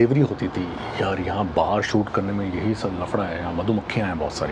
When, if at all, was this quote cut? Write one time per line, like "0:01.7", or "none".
none